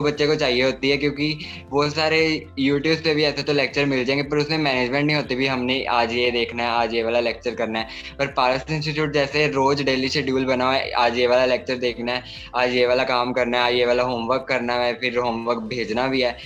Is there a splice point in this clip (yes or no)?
no